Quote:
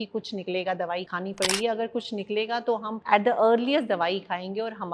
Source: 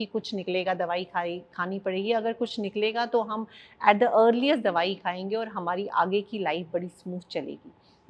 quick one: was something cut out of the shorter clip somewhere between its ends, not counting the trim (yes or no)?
yes